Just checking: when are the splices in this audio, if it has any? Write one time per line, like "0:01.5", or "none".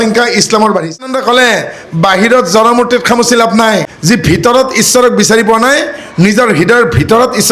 0:01.1
0:03.9